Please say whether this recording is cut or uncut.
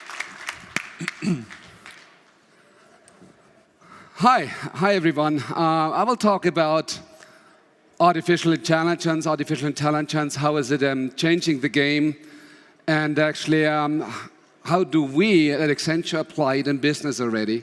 uncut